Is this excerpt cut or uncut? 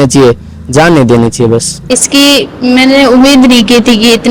cut